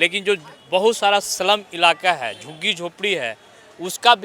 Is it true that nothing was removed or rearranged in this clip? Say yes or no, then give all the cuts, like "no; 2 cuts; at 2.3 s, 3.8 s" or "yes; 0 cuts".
yes; 0 cuts